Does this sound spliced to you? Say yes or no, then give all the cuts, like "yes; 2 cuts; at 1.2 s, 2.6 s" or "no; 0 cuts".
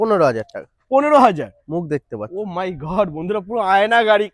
no; 0 cuts